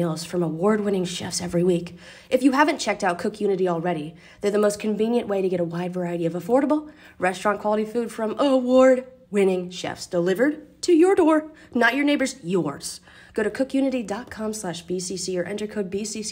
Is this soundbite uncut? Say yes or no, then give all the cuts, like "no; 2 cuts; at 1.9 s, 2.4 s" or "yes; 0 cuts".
yes; 0 cuts